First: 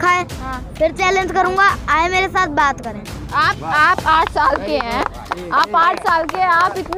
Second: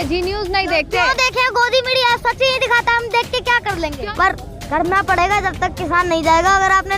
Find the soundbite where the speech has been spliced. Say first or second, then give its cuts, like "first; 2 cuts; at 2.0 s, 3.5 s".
second; 1 cut; at 4.0 s